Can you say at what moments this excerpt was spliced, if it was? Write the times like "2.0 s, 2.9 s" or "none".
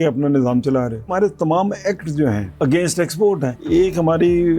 1.1 s, 2.5 s, 3.5 s